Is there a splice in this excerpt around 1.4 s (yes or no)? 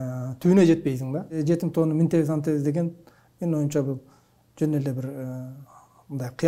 yes